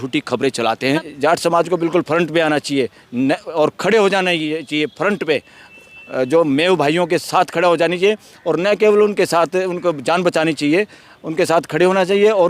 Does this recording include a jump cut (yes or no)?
yes